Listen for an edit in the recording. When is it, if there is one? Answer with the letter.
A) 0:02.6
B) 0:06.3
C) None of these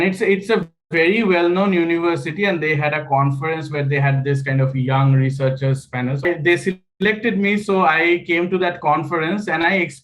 B